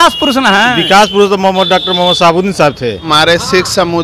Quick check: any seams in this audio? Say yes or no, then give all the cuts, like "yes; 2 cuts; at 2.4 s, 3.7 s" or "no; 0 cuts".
yes; 1 cut; at 3.0 s